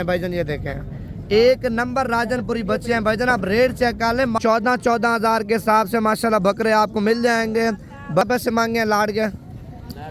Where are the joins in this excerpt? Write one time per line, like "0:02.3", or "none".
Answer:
0:04.4
0:08.2